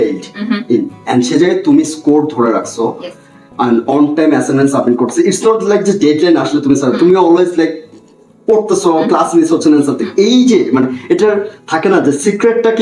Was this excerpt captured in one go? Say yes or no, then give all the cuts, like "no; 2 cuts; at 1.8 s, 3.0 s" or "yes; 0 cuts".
yes; 0 cuts